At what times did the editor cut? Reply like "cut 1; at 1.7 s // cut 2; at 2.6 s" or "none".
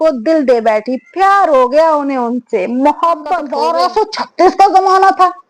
cut 1; at 3.5 s